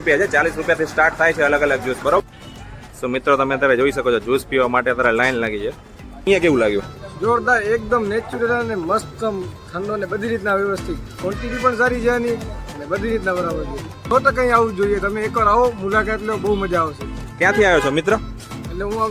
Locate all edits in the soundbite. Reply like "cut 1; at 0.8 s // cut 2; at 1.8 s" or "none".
cut 1; at 6.3 s // cut 2; at 14.0 s